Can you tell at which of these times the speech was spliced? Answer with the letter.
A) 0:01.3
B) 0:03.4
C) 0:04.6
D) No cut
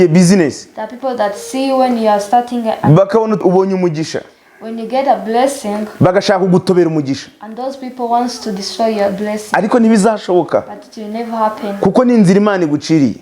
B